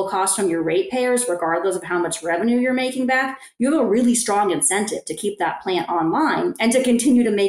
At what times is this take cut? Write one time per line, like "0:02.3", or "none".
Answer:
none